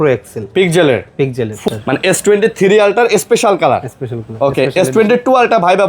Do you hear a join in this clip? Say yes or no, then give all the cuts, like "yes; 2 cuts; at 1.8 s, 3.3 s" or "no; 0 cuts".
yes; 1 cut; at 1.6 s